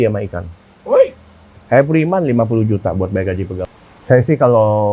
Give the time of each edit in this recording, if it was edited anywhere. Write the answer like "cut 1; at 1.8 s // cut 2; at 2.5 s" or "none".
cut 1; at 3.7 s